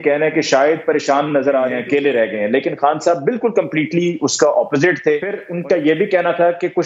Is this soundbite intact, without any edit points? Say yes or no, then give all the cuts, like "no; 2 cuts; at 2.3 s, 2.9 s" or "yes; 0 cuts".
no; 2 cuts; at 1.8 s, 5.4 s